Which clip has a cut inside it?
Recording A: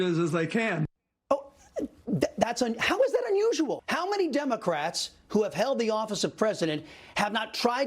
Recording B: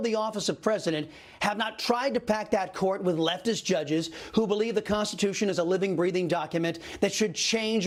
A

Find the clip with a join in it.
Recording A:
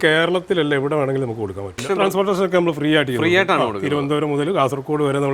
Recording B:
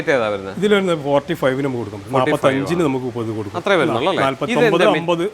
A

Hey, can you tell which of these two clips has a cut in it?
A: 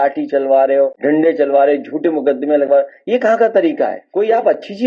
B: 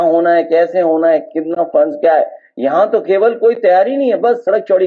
A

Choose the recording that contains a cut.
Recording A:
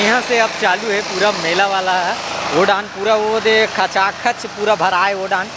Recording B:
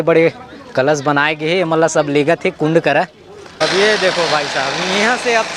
B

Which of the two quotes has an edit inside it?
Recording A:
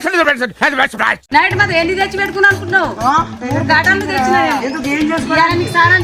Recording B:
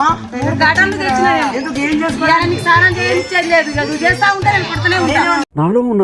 A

